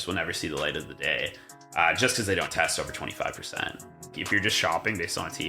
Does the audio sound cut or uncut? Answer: cut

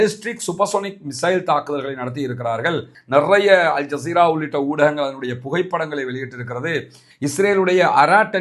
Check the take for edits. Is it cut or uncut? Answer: cut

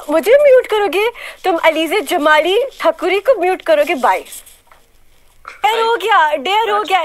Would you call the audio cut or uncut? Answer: cut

